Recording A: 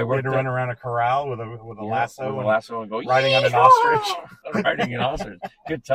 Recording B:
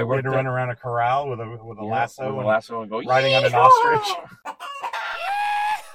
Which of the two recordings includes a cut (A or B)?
A